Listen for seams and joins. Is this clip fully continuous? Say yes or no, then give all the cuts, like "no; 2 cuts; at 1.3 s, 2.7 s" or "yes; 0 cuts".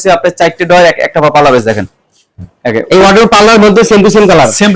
yes; 0 cuts